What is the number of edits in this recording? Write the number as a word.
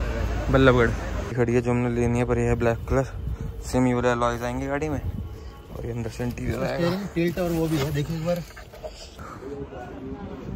two